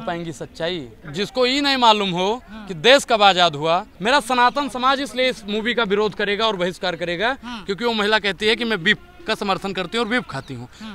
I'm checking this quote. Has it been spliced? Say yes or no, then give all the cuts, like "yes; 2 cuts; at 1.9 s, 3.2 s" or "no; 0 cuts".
yes; 2 cuts; at 1.0 s, 3.9 s